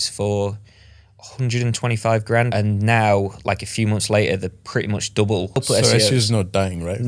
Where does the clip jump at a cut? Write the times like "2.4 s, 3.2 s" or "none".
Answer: 2.5 s, 5.6 s